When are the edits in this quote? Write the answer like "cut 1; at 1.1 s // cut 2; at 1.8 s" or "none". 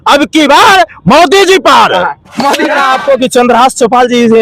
cut 1; at 2.8 s